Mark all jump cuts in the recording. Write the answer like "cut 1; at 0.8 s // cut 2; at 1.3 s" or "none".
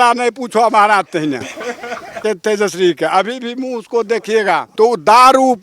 cut 1; at 2.2 s // cut 2; at 4.7 s